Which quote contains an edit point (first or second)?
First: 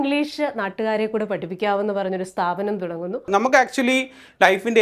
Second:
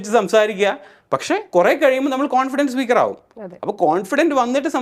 first